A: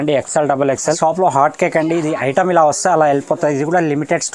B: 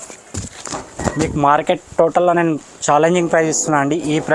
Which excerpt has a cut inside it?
A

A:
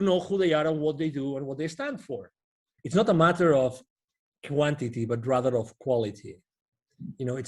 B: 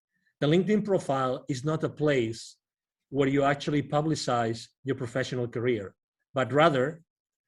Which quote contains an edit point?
A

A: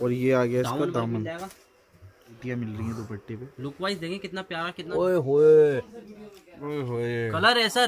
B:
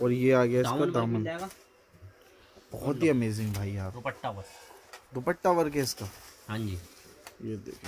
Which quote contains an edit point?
A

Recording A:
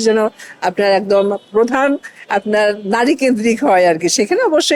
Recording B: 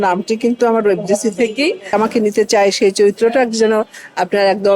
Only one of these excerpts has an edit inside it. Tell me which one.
B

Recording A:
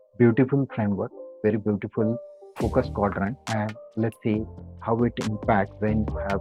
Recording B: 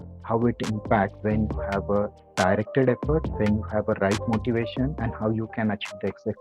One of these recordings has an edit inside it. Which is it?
B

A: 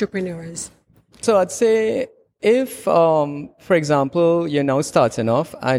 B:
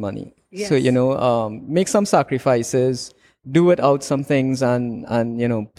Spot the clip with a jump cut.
A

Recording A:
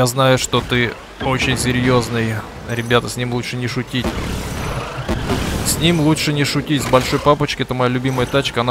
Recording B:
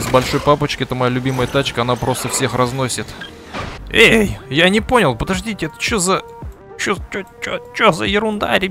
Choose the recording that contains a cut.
B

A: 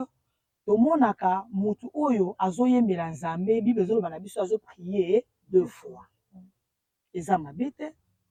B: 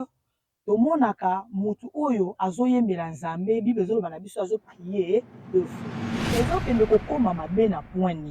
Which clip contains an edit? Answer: B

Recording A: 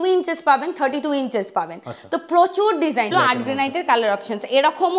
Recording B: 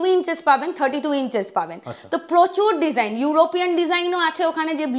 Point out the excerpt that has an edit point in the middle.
A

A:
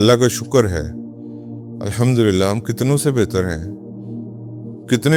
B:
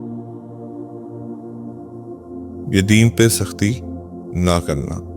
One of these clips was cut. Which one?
B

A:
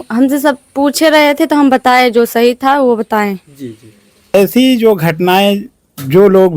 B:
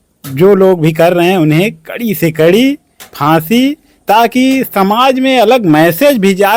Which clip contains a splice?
A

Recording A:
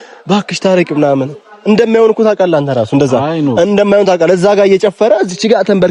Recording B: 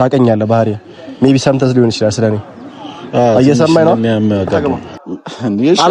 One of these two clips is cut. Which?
B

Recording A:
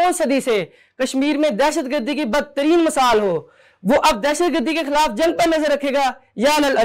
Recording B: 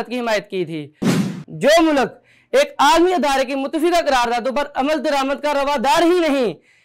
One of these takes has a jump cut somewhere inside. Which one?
B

